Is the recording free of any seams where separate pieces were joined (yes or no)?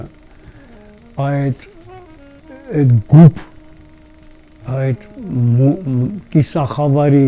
yes